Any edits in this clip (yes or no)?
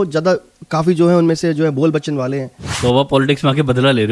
yes